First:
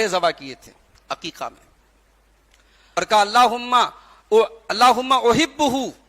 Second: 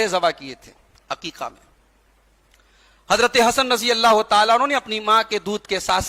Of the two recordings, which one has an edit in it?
first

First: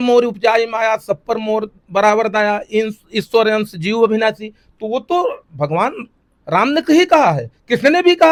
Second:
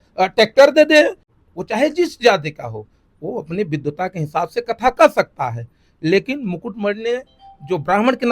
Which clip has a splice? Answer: second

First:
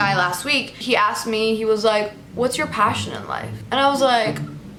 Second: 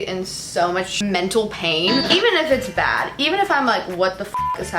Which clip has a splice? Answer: second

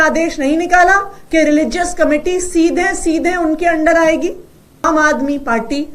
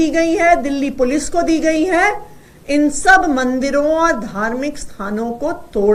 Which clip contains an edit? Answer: first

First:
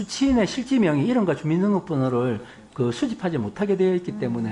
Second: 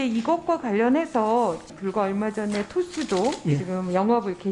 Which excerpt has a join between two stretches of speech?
second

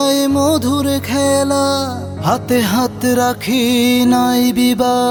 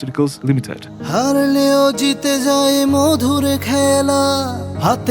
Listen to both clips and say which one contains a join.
second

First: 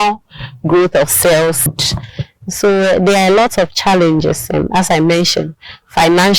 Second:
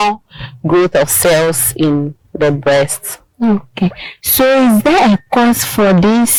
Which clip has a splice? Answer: first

